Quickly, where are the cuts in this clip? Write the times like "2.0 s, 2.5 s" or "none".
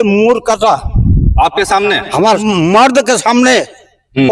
2.4 s